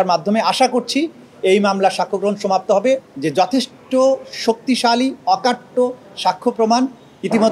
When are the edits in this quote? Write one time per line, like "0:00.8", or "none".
0:03.1